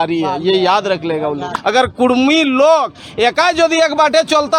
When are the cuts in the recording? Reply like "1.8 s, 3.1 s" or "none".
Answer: 1.5 s

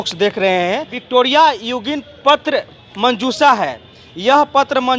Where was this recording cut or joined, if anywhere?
1.0 s

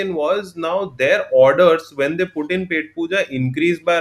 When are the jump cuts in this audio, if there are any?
none

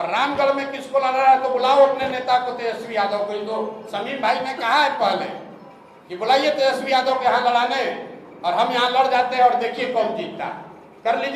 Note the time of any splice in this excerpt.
none

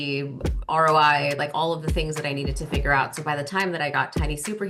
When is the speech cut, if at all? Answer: none

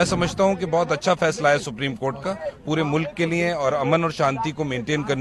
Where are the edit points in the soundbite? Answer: none

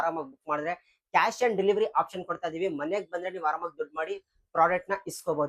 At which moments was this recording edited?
none

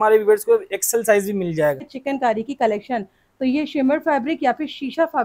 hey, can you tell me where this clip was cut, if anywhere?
2.0 s

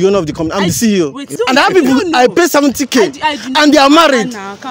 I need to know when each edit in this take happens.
1.3 s

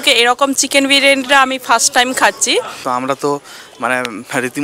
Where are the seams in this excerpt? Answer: 2.8 s

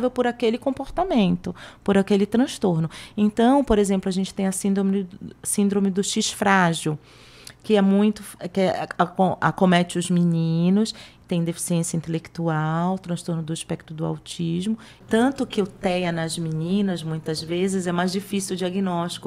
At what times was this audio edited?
15.0 s

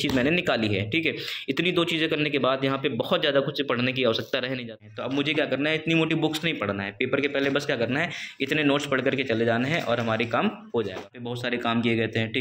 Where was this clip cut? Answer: 4.7 s, 11.3 s

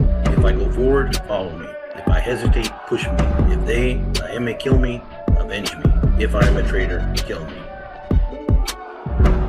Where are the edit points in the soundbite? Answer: 7.7 s

